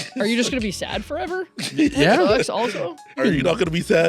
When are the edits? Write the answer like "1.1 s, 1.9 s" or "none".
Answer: 3.2 s